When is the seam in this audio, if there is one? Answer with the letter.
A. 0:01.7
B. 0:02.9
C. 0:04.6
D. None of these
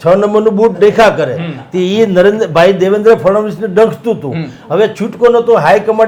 D